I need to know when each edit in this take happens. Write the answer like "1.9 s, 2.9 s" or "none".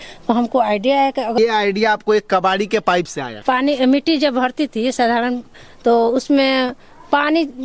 1.4 s, 3.3 s